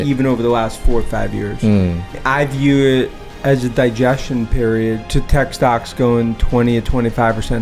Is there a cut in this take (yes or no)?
yes